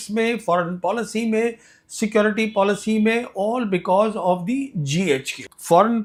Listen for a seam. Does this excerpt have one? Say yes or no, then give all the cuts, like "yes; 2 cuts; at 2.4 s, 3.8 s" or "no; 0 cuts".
no; 0 cuts